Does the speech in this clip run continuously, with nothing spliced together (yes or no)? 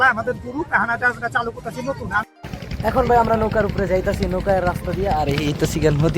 no